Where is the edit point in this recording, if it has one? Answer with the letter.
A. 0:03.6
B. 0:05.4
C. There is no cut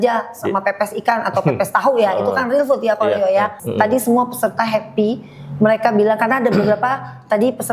A